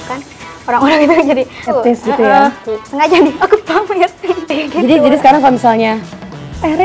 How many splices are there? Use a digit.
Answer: 3